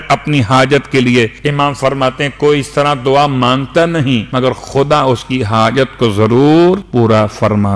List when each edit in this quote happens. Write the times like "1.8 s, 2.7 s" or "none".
1.4 s, 4.3 s, 6.9 s